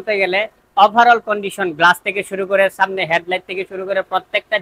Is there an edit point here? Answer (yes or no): no